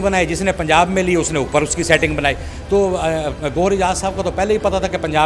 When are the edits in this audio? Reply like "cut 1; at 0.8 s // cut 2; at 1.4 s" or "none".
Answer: none